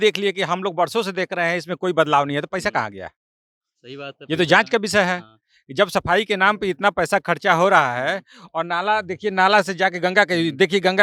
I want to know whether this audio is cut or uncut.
uncut